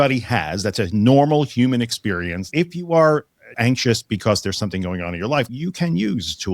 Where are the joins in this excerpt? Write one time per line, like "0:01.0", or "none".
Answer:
0:02.5
0:03.5
0:05.5